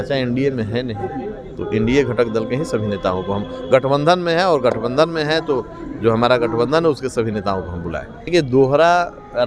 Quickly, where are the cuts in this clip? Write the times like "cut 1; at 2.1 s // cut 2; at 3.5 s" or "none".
cut 1; at 8.3 s

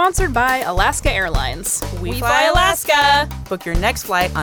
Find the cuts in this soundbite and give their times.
none

